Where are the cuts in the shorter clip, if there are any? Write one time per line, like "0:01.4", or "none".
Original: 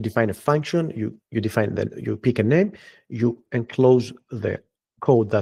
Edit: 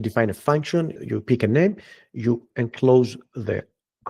0:01.0